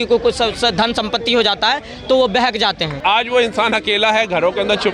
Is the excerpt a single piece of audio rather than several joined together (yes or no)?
no